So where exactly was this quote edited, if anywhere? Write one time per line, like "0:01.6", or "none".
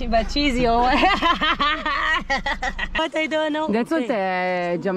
0:03.0